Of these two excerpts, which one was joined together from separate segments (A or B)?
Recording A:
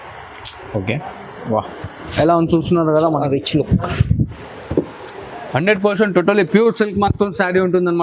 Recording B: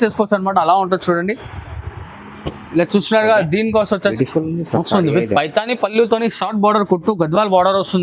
B